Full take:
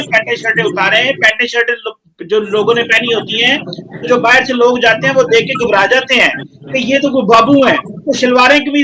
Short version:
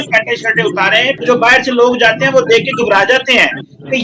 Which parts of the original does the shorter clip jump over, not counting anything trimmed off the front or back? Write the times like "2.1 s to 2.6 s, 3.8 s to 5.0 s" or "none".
1.2 s to 4.0 s